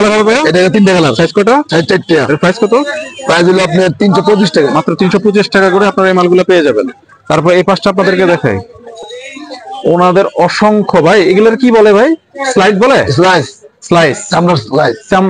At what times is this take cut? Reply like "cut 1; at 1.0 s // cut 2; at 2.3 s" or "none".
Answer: none